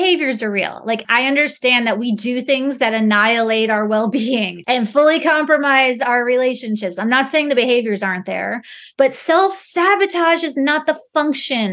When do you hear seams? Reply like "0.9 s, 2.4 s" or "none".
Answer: 1.0 s, 4.5 s